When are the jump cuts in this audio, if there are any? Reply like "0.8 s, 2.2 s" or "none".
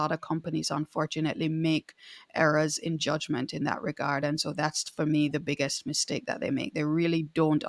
none